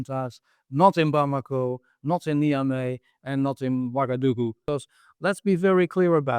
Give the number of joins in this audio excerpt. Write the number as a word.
one